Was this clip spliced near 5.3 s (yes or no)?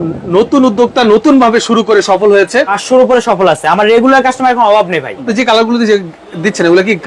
yes